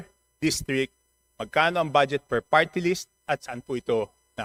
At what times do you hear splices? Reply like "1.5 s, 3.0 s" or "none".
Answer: none